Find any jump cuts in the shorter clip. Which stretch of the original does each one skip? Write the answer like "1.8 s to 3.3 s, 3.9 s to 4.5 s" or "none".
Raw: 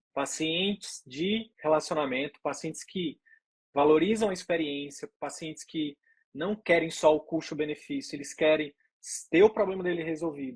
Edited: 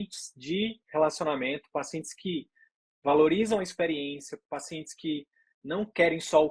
none